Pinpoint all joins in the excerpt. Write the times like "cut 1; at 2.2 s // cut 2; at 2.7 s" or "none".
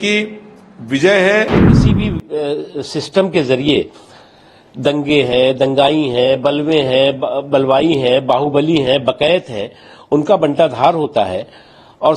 cut 1; at 1.7 s

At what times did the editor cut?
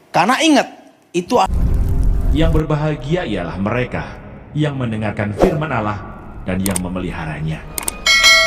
cut 1; at 1.5 s

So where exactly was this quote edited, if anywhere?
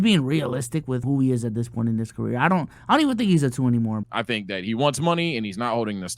cut 1; at 1.0 s // cut 2; at 4.1 s

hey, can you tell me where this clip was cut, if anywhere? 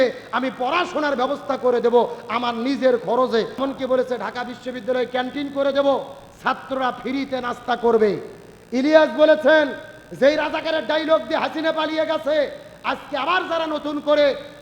cut 1; at 3.5 s

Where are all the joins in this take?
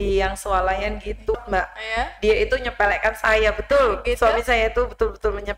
cut 1; at 1.4 s

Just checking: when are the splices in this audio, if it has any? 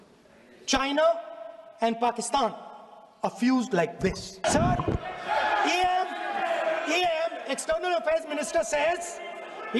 cut 1; at 4.4 s

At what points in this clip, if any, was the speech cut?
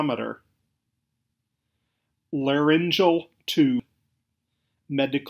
cut 1; at 1.0 s // cut 2; at 3.8 s

